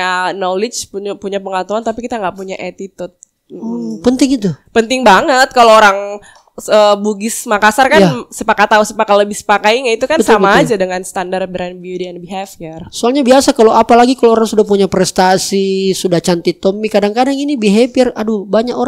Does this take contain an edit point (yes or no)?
no